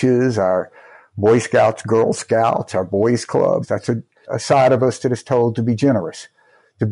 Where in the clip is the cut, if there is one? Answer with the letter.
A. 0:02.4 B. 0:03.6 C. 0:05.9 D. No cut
B